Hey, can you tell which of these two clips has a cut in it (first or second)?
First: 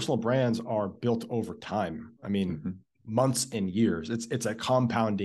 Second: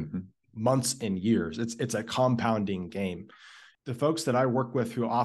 second